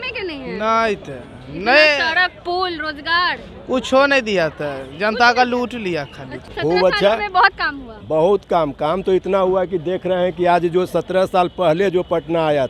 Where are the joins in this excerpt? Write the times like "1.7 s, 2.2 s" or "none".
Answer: 6.4 s

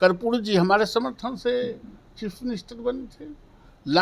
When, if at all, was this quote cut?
none

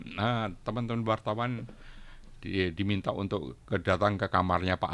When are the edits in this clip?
none

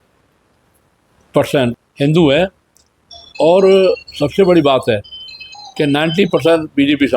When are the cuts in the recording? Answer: 1.9 s

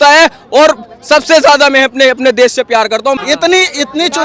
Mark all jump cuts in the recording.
3.2 s

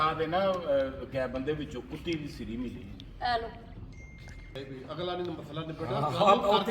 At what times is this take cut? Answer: none

